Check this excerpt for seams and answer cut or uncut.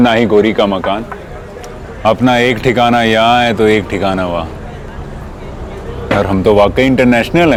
uncut